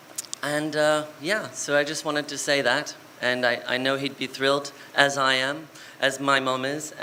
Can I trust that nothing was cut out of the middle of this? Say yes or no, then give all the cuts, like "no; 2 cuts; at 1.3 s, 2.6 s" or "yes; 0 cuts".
yes; 0 cuts